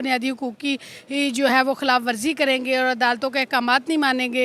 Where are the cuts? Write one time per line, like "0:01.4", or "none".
none